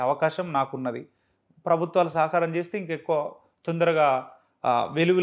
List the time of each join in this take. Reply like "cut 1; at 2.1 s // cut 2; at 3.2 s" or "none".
none